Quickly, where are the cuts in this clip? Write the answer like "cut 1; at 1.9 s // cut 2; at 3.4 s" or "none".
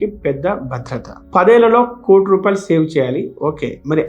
cut 1; at 1.2 s